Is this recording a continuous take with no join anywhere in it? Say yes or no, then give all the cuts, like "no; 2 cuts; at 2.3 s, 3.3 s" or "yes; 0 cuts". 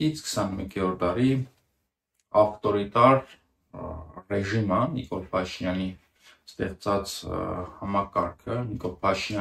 yes; 0 cuts